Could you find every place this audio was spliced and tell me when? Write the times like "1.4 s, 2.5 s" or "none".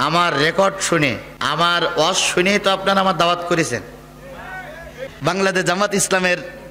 5.0 s